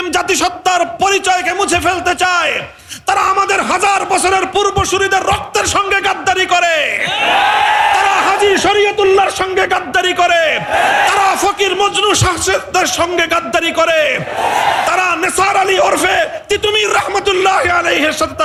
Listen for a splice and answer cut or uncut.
uncut